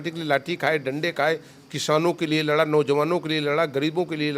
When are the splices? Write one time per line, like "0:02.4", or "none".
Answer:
none